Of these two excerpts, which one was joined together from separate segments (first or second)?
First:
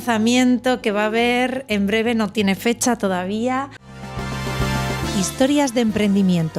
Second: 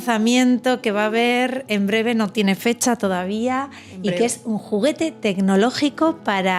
first